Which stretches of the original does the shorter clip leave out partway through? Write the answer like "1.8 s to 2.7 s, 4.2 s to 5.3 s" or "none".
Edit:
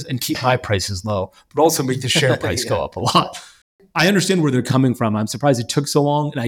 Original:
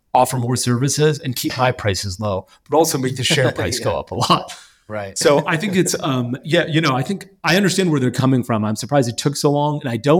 4.9 s to 7.3 s